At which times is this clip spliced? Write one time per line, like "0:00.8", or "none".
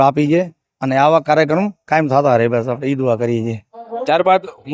none